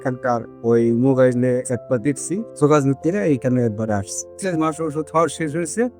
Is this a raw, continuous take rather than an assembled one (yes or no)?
no